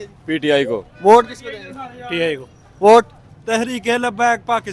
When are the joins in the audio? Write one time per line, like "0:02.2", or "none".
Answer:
none